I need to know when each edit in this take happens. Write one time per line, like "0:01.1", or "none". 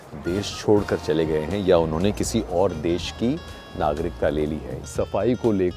0:04.7